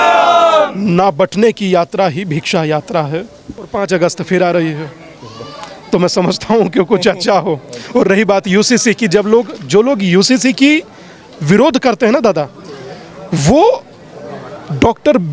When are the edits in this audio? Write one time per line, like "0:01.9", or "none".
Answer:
0:03.7